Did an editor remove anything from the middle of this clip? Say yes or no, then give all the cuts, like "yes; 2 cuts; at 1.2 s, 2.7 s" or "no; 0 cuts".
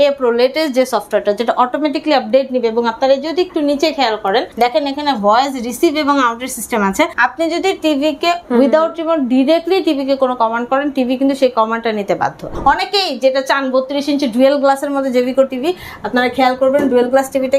yes; 4 cuts; at 4.5 s, 7.1 s, 8.4 s, 12.5 s